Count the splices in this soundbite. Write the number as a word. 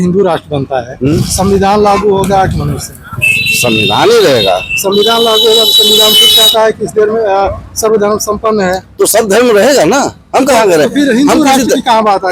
zero